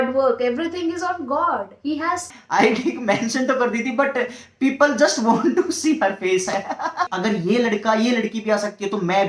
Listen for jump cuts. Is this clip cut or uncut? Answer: cut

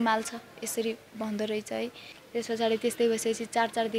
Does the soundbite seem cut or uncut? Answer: cut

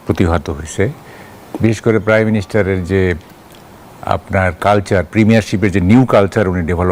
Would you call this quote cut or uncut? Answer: uncut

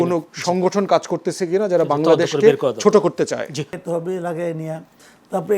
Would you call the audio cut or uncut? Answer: cut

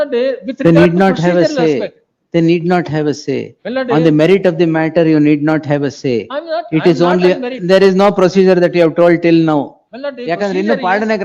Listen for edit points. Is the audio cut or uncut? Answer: uncut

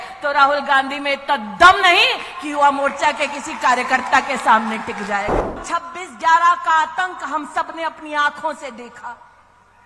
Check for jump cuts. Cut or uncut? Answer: cut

